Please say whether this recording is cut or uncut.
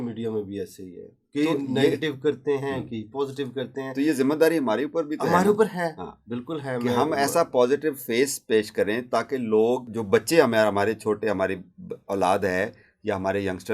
cut